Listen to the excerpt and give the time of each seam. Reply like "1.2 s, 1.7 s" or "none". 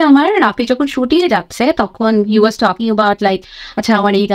none